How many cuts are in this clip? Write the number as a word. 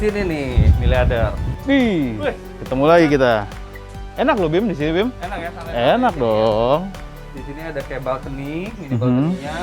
zero